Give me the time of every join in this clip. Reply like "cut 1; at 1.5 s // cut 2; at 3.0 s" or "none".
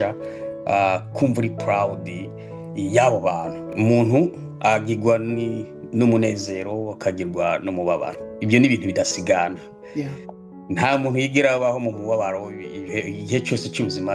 cut 1; at 3.7 s